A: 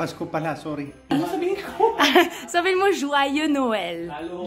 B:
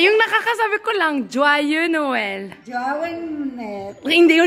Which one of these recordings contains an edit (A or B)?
A